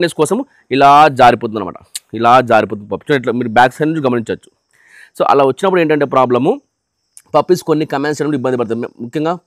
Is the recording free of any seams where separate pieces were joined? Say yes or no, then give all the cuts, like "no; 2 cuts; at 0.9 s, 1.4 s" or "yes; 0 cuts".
yes; 0 cuts